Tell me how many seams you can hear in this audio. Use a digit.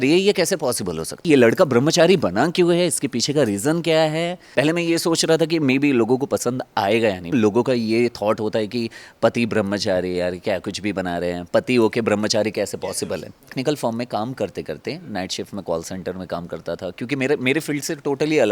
4